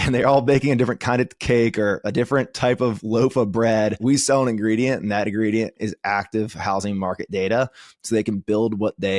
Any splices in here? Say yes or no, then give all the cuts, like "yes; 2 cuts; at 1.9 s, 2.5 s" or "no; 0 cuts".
yes; 2 cuts; at 4.0 s, 5.8 s